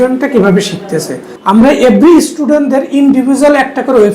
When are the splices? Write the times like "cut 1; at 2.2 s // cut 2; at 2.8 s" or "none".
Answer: cut 1; at 1.3 s